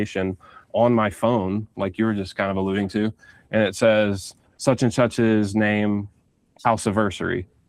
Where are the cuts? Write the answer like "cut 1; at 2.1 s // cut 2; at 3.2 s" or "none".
none